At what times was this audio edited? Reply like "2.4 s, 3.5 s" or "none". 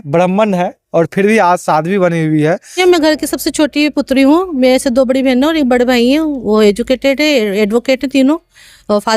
2.8 s